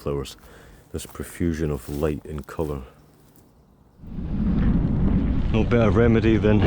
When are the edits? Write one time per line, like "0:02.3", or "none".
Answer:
0:04.2

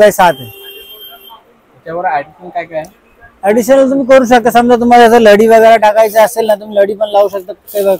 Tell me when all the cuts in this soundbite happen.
none

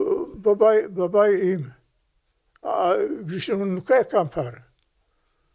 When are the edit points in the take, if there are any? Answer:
none

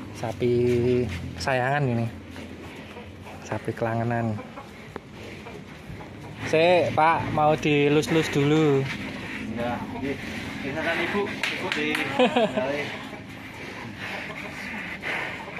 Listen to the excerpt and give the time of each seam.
0:06.4

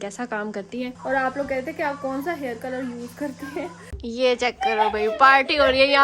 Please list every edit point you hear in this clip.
0:01.0
0:03.9

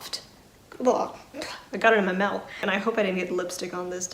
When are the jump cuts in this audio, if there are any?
0:02.6

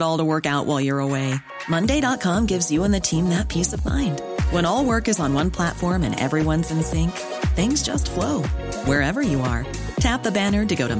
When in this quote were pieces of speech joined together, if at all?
none

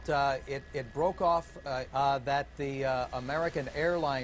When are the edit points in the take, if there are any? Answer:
none

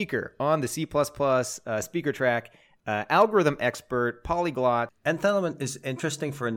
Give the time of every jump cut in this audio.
0:05.1

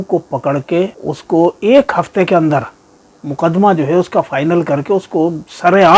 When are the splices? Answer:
0:01.1

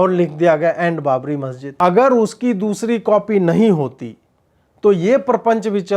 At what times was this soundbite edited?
0:01.6

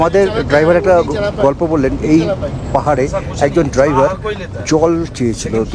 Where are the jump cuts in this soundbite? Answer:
none

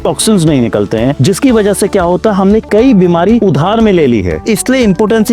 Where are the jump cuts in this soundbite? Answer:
0:01.2
0:03.4
0:04.3

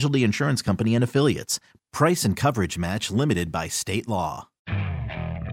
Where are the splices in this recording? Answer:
0:04.5

